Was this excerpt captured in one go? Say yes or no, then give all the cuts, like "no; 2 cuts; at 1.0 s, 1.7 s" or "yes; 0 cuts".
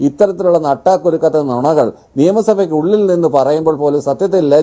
yes; 0 cuts